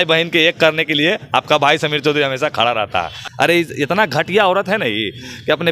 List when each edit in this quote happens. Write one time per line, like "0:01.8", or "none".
0:03.3

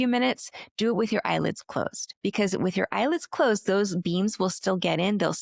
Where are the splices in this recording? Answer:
0:02.0

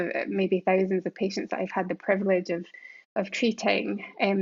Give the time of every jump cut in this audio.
none

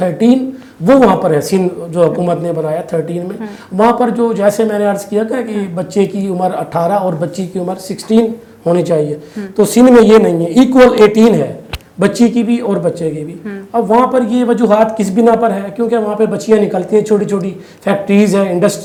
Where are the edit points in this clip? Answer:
none

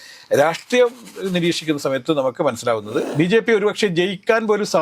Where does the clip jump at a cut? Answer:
0:03.1

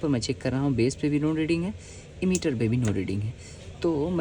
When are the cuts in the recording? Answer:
none

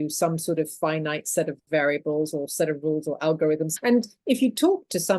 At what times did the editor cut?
0:03.7

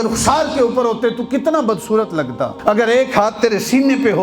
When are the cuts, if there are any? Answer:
0:02.6

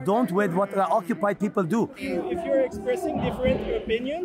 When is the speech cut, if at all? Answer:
0:02.0

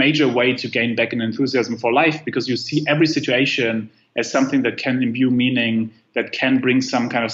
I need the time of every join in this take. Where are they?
none

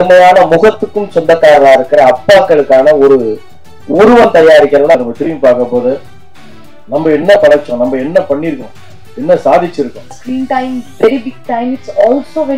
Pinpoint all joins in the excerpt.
0:04.9
0:10.2

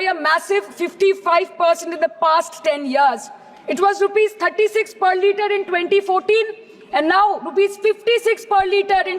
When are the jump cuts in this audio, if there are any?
none

